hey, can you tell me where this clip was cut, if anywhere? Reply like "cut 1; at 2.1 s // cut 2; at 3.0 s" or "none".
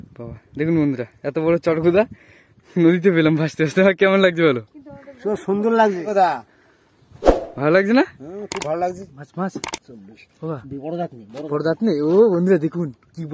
cut 1; at 6.0 s // cut 2; at 9.1 s